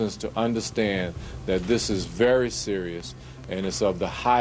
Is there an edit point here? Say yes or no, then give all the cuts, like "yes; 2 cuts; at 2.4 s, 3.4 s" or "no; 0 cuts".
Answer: no; 0 cuts